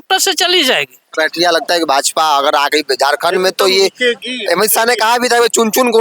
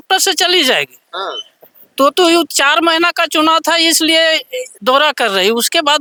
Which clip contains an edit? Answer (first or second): first